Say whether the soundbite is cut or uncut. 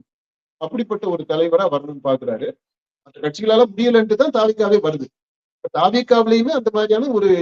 cut